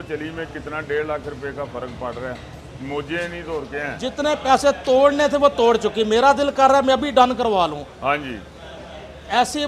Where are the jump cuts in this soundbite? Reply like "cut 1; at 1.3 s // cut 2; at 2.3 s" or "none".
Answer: none